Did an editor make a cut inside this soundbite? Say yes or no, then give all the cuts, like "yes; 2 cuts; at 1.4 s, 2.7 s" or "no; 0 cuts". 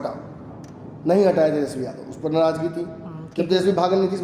no; 0 cuts